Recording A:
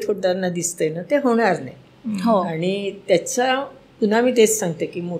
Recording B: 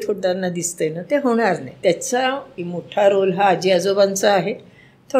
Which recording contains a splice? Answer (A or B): B